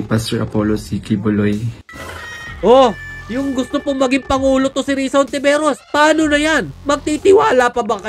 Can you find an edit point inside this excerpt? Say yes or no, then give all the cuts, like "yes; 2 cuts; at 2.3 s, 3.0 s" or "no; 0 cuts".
yes; 1 cut; at 1.8 s